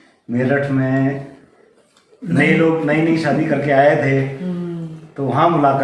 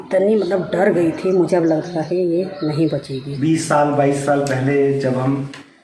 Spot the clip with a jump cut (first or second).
second